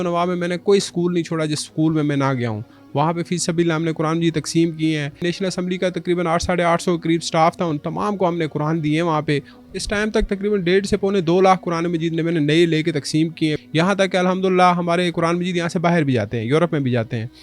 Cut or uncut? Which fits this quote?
cut